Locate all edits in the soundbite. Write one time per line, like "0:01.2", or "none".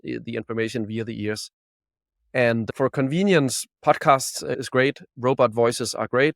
0:02.7
0:03.7
0:04.5